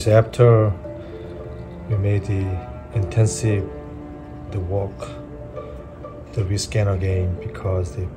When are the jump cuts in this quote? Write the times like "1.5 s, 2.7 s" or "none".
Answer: none